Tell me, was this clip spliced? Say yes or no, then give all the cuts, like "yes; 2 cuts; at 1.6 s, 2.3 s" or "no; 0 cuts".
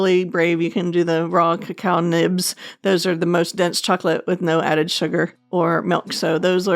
yes; 1 cut; at 5.4 s